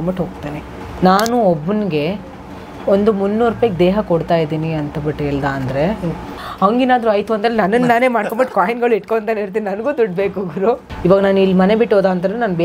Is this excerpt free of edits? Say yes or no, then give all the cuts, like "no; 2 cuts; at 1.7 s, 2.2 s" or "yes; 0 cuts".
no; 3 cuts; at 0.9 s, 6.3 s, 10.9 s